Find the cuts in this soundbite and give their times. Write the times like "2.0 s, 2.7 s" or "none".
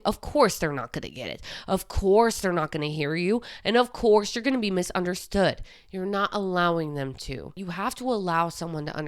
7.6 s